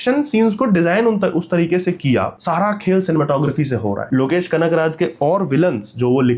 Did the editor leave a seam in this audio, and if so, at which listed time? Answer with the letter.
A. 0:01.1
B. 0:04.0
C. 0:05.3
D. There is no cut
B